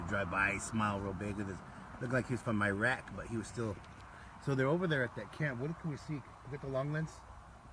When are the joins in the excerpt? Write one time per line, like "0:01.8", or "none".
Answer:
0:03.3